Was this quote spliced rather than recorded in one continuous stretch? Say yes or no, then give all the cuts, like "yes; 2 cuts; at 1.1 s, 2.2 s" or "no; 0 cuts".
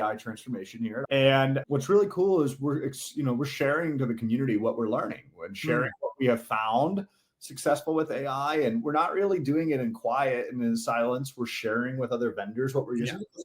yes; 1 cut; at 1.0 s